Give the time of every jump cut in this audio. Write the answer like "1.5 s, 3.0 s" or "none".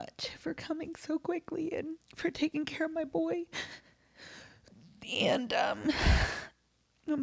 2.0 s